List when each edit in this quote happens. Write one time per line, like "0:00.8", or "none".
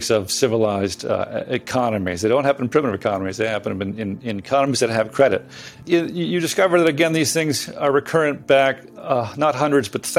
0:05.7

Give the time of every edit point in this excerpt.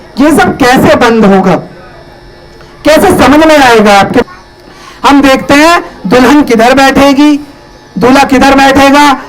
0:04.2

